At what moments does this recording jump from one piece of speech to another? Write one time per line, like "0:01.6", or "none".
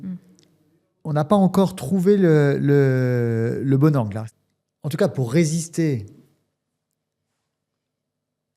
0:04.2